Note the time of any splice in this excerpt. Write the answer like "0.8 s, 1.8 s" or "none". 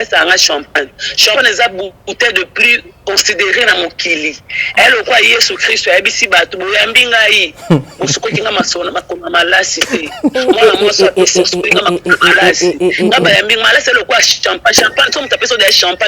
none